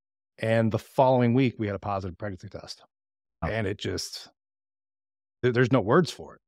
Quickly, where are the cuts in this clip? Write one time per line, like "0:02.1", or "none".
0:03.4